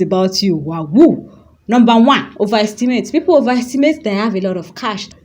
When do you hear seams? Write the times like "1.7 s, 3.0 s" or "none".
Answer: none